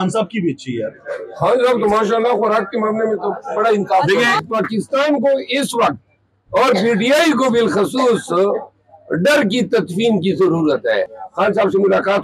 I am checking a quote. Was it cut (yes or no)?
yes